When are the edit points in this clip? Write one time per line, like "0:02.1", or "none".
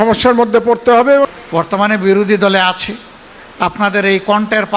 0:01.3